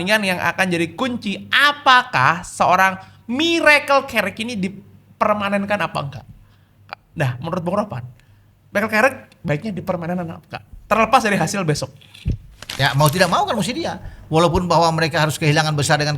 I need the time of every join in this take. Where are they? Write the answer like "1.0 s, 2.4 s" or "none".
12.7 s